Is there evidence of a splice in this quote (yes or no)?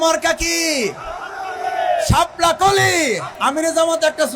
yes